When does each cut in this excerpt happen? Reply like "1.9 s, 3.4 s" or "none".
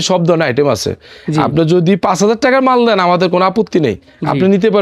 none